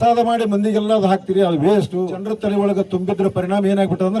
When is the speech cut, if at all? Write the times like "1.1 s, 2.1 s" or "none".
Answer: 2.2 s